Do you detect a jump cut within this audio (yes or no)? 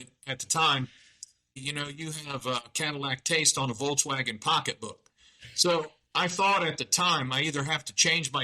yes